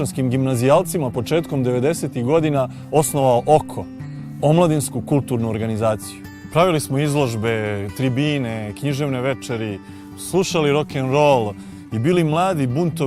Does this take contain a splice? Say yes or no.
yes